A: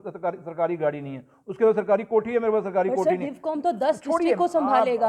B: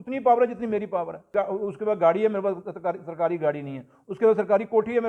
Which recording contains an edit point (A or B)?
B